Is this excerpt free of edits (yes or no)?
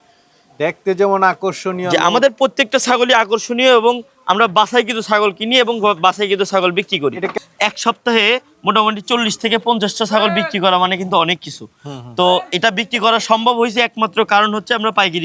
no